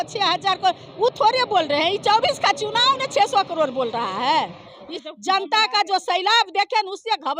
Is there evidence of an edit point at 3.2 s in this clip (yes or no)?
no